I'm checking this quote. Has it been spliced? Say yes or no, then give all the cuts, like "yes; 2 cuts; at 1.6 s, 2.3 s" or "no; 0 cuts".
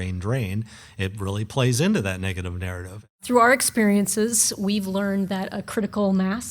yes; 1 cut; at 3.2 s